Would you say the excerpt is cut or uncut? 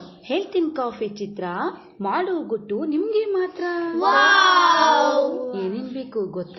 uncut